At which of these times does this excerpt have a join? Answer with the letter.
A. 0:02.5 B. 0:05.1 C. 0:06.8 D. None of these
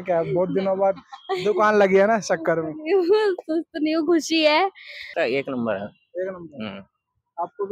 B